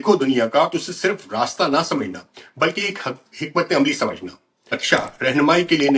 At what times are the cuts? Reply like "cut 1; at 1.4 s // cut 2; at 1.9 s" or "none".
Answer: cut 1; at 4.8 s